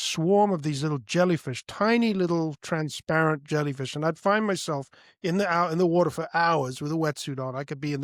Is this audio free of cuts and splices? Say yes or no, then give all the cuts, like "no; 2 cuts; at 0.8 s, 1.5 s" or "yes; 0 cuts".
yes; 0 cuts